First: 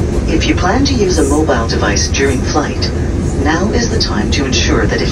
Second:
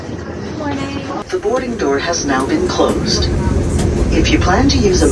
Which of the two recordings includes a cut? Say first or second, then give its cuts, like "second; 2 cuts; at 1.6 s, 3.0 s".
second; 1 cut; at 1.1 s